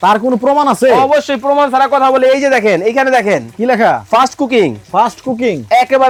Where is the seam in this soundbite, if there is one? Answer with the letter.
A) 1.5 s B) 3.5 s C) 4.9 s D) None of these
D